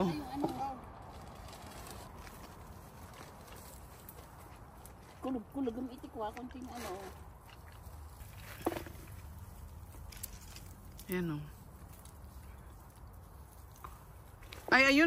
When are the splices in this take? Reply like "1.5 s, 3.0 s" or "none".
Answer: 2.1 s, 8.2 s